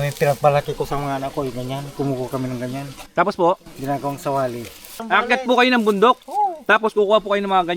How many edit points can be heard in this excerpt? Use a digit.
1